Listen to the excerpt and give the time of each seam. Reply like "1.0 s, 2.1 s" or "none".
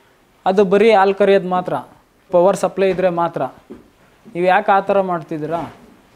2.3 s